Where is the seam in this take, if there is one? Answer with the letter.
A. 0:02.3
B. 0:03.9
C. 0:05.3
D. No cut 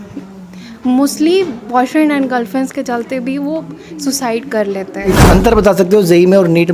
C